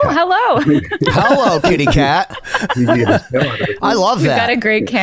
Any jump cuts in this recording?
no; 0 cuts

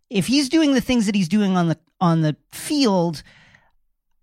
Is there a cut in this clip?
no; 0 cuts

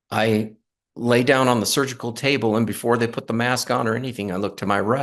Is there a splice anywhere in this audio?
no; 0 cuts

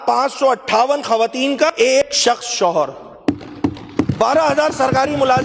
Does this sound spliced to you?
yes; 1 cut; at 1.9 s

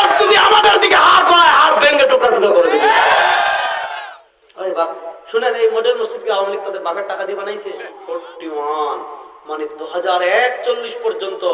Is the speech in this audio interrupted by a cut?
yes; 2 cuts; at 3.9 s, 7.9 s

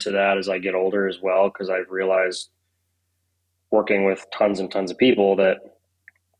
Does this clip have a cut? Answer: no; 0 cuts

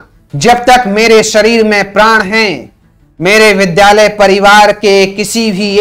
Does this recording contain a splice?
no; 0 cuts

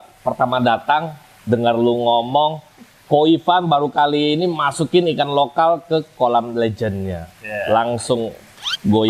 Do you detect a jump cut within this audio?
no; 0 cuts

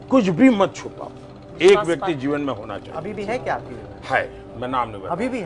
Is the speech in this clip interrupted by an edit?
no; 0 cuts

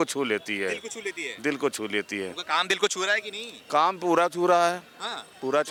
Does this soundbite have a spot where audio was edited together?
no; 0 cuts

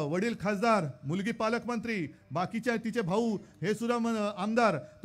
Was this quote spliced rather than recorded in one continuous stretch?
no; 0 cuts

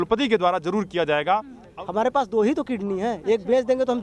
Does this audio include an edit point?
yes; 1 cut; at 1.6 s

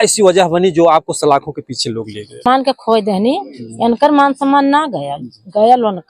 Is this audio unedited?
no; 1 cut; at 2.4 s

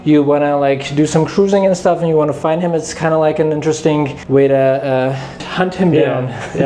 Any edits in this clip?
yes; 2 cuts; at 4.2 s, 5.4 s

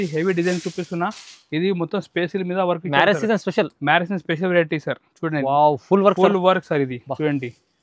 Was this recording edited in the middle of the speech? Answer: no; 0 cuts

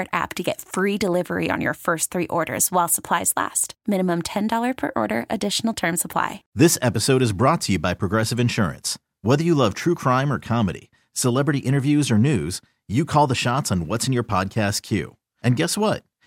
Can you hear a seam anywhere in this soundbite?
yes; 1 cut; at 6.4 s

